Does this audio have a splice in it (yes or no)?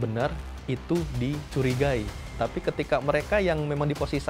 no